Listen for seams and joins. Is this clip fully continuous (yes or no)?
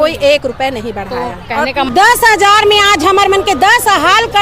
no